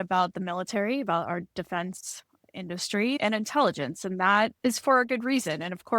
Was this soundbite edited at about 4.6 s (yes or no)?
yes